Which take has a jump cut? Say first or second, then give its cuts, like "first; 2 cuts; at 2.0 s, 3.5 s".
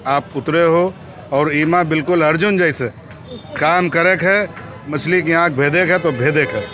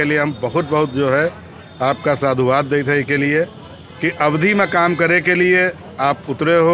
first; 1 cut; at 4.9 s